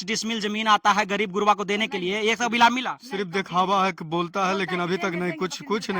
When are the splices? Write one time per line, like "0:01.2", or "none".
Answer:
none